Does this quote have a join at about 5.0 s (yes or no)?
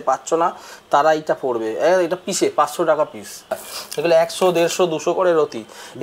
no